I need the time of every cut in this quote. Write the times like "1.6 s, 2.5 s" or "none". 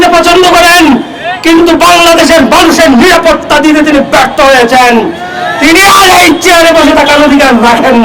none